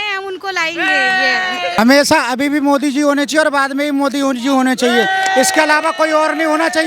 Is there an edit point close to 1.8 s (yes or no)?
yes